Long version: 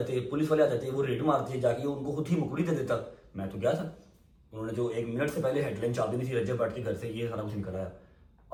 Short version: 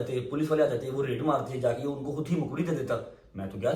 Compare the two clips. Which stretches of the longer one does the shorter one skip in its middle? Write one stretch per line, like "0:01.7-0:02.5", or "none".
none